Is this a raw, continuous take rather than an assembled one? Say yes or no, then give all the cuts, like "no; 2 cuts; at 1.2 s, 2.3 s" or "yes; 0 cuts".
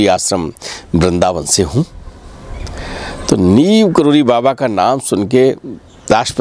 yes; 0 cuts